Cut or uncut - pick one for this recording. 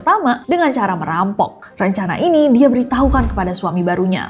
uncut